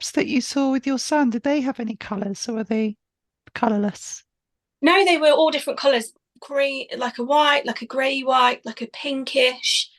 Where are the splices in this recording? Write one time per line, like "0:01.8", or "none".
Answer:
0:06.1